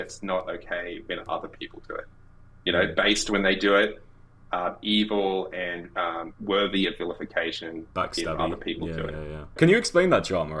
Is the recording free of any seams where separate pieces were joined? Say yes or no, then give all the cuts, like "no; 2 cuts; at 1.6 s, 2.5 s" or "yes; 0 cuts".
no; 1 cut; at 9.6 s